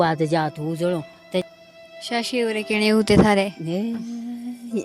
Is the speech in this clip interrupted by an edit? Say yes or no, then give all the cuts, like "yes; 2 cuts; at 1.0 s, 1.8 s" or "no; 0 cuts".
yes; 1 cut; at 1.4 s